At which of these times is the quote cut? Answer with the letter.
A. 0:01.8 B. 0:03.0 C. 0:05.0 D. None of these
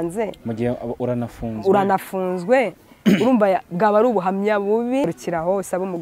C